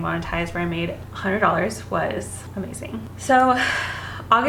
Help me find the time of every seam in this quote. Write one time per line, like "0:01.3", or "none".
none